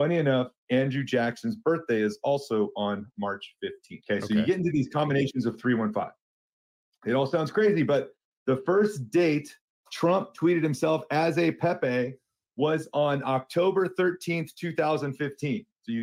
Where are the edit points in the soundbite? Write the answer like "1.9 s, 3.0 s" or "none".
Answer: 3.9 s